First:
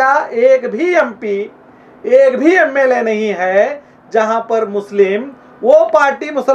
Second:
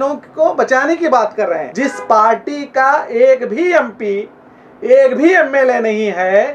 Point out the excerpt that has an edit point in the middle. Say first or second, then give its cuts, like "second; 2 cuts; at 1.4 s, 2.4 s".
second; 1 cut; at 1.7 s